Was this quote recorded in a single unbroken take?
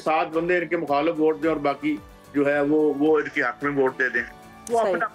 yes; 0 cuts

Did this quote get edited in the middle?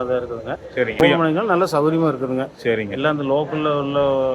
yes; 1 cut; at 1.0 s

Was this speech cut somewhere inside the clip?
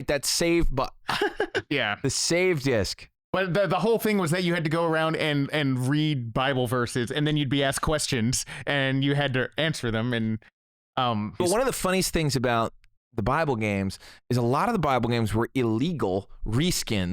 yes; 1 cut; at 11.4 s

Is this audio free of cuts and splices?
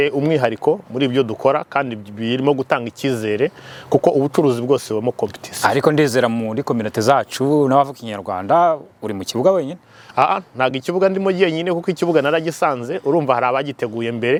yes; 0 cuts

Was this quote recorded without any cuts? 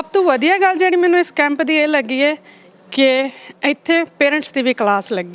yes; 0 cuts

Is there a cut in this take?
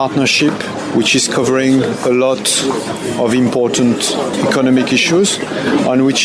no; 0 cuts

